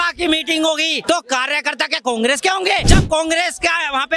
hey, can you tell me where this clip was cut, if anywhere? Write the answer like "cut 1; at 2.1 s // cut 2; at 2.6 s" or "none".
cut 1; at 1.0 s // cut 2; at 2.9 s